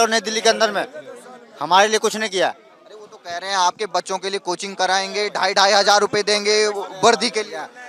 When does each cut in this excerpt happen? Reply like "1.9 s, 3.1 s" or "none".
none